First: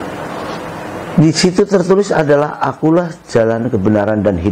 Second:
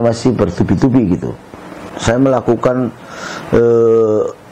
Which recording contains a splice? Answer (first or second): second